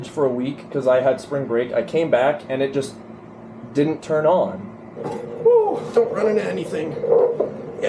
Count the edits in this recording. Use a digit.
1